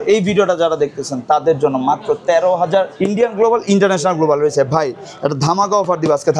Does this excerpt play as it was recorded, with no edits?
no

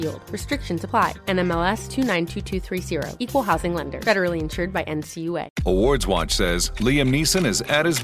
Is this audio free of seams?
no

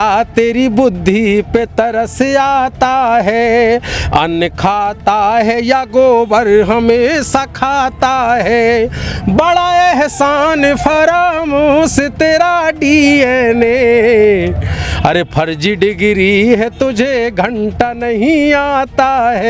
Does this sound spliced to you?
no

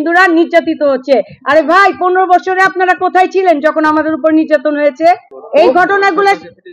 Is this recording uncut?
yes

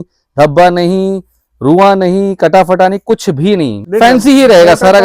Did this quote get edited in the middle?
yes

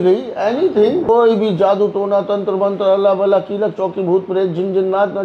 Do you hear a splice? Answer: yes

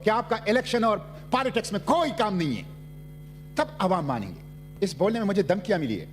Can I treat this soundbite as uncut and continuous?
no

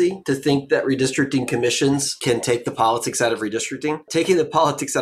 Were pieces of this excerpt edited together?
yes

